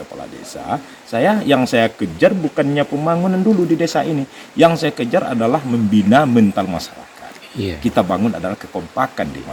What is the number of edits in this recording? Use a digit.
0